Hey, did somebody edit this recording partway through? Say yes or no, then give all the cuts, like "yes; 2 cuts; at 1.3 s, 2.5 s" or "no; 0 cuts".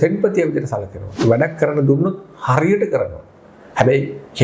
yes; 1 cut; at 1.0 s